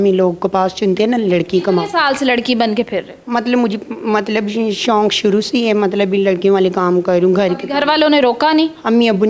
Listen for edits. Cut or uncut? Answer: uncut